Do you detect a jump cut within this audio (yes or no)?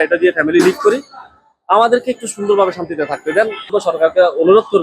yes